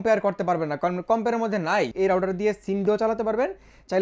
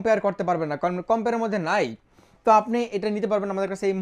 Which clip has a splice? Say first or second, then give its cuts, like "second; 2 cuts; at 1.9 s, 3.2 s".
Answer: first; 1 cut; at 1.9 s